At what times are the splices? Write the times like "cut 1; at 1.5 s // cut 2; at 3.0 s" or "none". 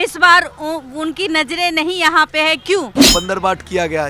cut 1; at 2.9 s